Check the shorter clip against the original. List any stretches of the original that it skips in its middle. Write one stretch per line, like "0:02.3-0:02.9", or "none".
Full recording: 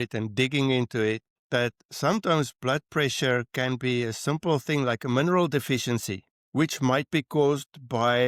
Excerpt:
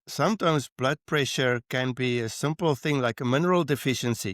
none